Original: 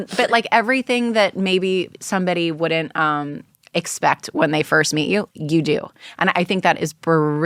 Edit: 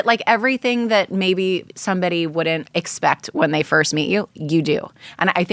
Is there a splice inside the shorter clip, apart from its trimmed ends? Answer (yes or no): yes